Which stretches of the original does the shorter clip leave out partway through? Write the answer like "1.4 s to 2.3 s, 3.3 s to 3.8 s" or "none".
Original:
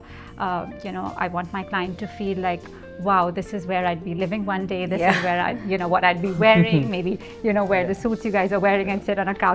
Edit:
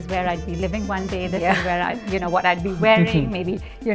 none